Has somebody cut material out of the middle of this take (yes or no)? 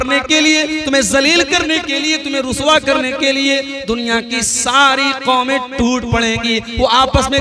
no